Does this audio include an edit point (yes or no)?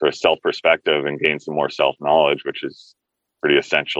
no